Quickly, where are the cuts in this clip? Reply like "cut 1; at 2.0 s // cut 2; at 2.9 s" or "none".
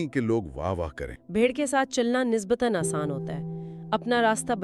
cut 1; at 1.1 s